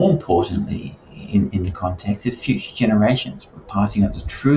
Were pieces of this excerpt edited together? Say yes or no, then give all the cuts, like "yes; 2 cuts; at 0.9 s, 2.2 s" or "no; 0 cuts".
no; 0 cuts